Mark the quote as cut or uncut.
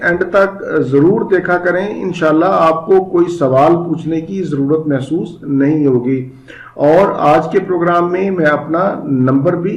uncut